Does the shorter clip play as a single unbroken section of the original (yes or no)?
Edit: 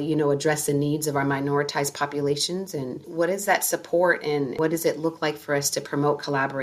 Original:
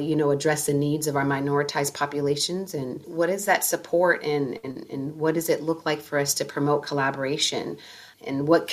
no